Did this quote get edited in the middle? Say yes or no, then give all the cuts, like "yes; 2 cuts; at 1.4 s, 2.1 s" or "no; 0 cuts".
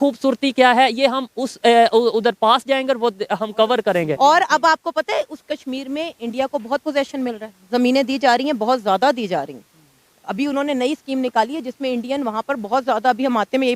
yes; 1 cut; at 4.2 s